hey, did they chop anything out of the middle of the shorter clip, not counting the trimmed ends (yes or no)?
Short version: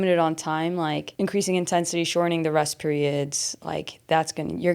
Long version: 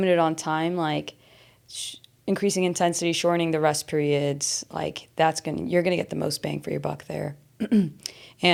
yes